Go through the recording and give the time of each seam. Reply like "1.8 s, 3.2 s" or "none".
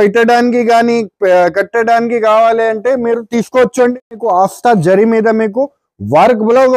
3.9 s